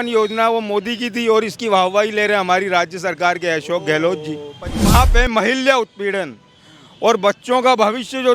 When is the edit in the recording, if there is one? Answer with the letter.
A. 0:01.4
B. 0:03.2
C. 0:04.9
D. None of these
C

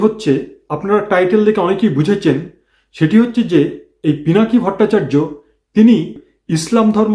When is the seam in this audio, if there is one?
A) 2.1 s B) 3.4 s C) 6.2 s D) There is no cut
C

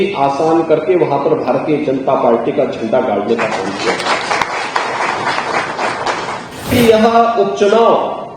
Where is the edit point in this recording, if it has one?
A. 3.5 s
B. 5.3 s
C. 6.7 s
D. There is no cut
C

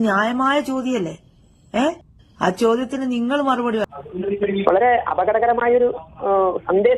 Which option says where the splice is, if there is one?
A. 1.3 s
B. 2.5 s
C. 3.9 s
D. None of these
C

